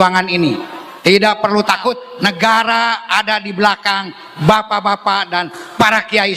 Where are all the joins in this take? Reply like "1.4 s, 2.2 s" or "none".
2.1 s